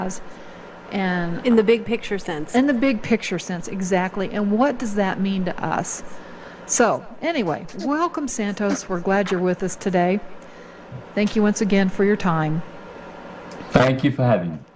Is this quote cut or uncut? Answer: cut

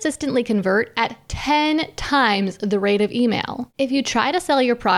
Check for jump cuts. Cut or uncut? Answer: cut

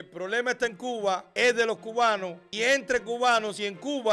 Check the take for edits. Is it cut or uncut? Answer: cut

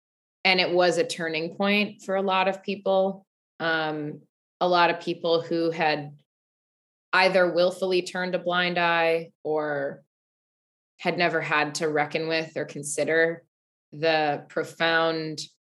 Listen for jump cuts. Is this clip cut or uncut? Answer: uncut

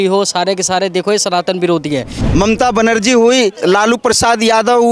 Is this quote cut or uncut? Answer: cut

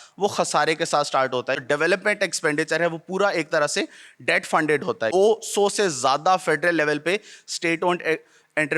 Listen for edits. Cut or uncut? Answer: cut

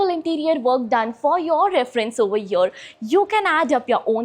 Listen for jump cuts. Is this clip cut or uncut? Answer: uncut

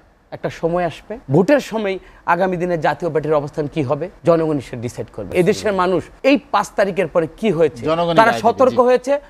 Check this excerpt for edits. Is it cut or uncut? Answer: cut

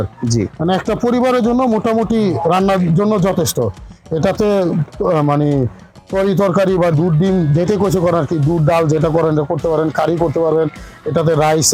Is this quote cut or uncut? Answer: uncut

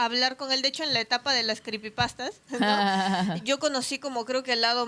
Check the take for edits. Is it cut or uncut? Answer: uncut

